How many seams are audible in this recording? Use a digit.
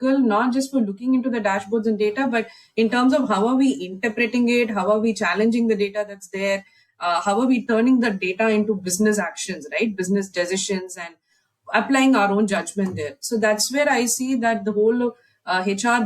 0